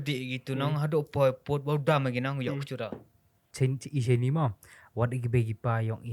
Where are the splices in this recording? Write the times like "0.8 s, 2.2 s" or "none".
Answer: 3.4 s